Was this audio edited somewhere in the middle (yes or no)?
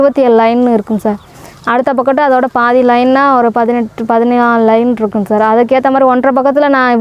no